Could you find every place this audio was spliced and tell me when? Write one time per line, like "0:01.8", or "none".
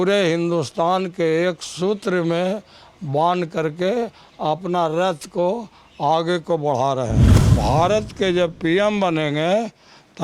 0:07.5